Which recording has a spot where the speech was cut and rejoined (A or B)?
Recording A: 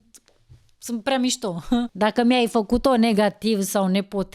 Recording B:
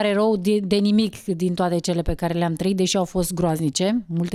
A